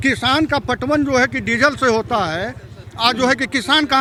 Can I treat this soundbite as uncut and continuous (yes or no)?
yes